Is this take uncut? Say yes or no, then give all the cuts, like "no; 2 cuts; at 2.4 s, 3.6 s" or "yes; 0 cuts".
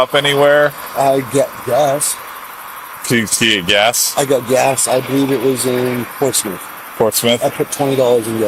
yes; 0 cuts